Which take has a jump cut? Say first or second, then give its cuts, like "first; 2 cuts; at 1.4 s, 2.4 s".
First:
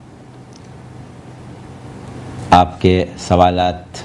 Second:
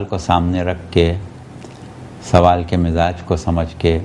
second; 1 cut; at 2.2 s